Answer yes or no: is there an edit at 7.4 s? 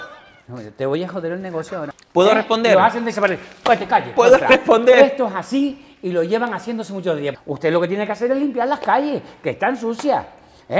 yes